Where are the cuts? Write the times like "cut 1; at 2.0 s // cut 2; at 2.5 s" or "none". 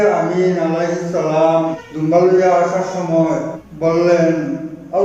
cut 1; at 1.8 s // cut 2; at 3.6 s